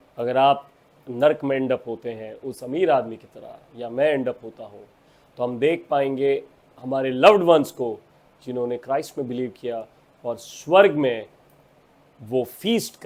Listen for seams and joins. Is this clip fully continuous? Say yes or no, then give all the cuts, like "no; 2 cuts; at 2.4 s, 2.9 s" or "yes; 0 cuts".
yes; 0 cuts